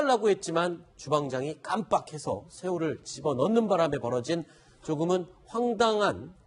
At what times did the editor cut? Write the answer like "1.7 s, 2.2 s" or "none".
2.8 s

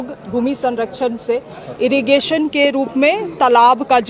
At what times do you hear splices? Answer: none

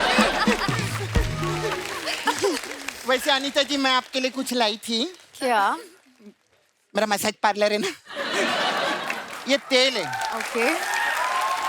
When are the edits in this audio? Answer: 1.9 s

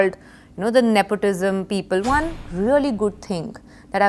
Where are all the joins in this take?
2.0 s

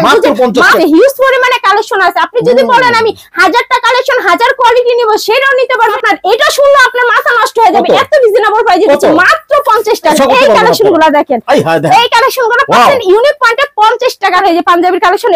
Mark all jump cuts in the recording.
0.8 s, 6.0 s, 10.2 s, 14.4 s

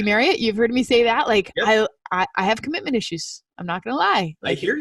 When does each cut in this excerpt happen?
none

